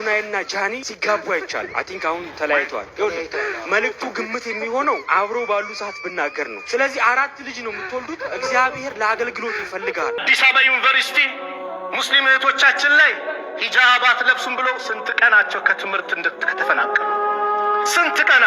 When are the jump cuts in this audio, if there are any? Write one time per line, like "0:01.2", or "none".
0:10.2